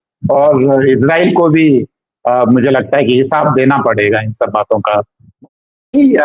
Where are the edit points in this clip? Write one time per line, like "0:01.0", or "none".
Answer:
0:05.2